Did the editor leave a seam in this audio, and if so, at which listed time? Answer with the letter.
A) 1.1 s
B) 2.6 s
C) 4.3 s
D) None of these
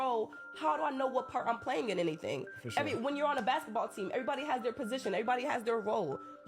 B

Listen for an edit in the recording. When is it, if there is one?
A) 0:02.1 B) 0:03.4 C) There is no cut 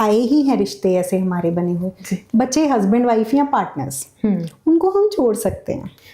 A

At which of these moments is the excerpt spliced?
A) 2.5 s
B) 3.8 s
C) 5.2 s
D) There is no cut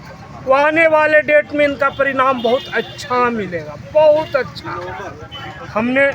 D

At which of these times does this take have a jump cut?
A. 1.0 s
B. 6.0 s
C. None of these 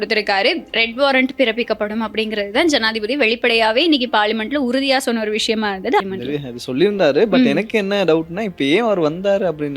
B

